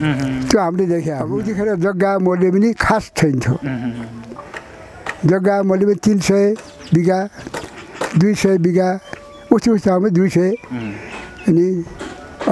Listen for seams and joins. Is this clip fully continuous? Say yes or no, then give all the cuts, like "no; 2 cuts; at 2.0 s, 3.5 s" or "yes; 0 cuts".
no; 1 cut; at 1.4 s